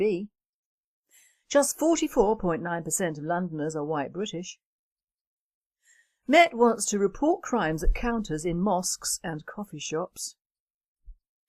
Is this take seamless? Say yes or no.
no